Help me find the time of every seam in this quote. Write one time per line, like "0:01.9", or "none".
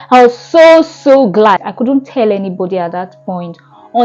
0:01.6